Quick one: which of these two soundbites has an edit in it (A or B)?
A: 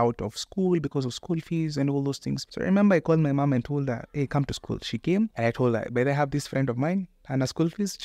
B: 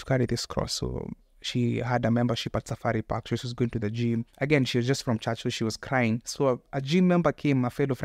A